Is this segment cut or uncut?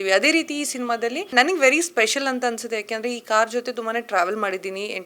cut